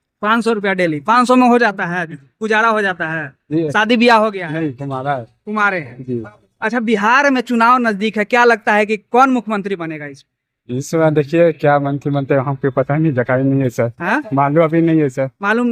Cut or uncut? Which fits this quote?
uncut